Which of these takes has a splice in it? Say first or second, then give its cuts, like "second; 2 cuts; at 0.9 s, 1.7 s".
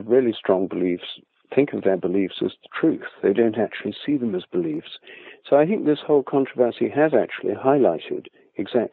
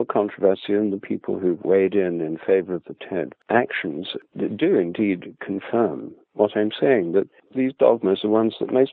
second; 3 cuts; at 3.4 s, 4.2 s, 7.4 s